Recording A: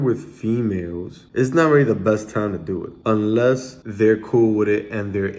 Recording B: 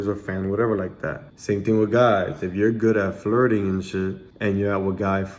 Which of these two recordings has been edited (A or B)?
A